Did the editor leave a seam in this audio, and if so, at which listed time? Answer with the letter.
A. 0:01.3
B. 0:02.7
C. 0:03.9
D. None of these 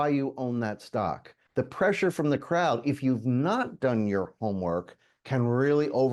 A